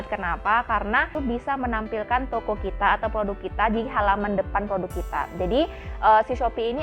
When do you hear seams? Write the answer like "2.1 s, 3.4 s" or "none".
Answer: 1.1 s